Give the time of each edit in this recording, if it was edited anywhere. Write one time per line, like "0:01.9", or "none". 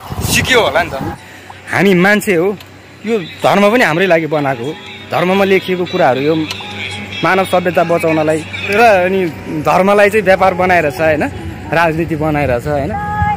0:01.1
0:08.7